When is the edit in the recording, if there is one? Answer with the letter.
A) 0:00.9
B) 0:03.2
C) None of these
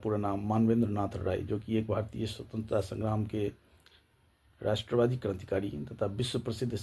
C